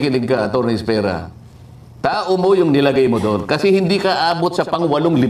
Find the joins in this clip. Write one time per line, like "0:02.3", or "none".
none